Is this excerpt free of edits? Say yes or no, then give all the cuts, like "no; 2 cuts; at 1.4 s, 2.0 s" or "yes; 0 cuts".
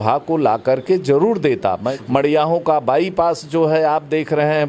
no; 1 cut; at 1.9 s